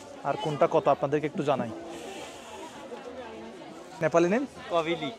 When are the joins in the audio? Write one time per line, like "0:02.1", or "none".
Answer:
0:03.8